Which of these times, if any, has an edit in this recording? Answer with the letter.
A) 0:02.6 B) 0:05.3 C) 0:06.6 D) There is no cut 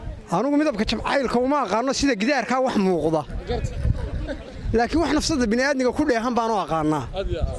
D